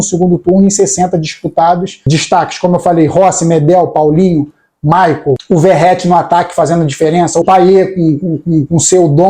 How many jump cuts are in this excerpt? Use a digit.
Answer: 3